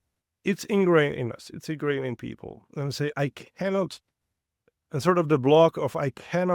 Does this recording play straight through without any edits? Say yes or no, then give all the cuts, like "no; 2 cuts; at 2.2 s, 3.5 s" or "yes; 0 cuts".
yes; 0 cuts